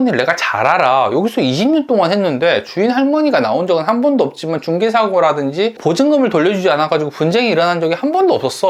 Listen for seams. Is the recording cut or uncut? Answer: uncut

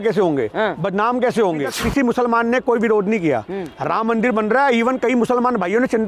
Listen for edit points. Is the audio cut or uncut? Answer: cut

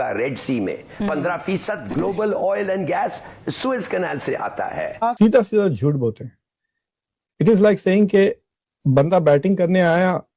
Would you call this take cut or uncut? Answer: cut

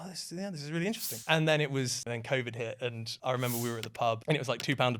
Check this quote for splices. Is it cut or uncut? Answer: cut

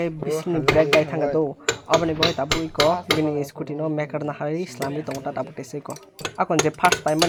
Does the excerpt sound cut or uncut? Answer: uncut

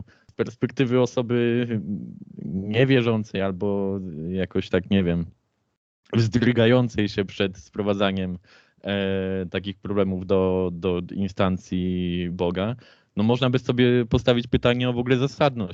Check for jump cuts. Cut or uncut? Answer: uncut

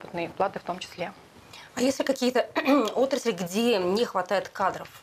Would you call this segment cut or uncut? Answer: uncut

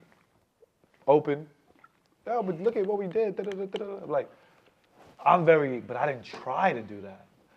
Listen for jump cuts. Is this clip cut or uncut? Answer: uncut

